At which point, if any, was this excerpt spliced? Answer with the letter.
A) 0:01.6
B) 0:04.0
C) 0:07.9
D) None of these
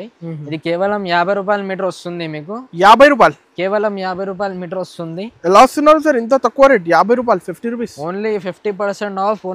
D